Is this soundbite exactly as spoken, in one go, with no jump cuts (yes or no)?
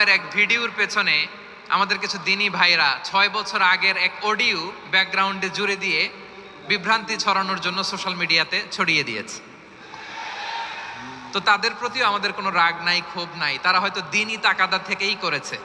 yes